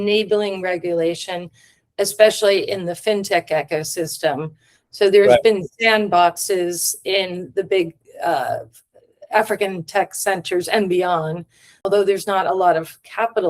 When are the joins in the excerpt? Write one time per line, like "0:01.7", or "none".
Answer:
0:11.8

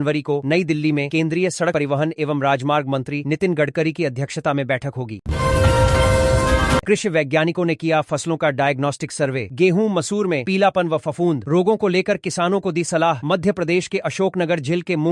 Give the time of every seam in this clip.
0:05.2
0:06.9

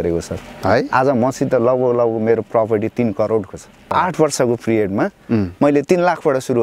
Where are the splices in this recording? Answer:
0:03.9

